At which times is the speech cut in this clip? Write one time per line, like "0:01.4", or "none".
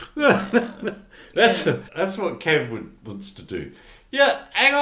0:01.9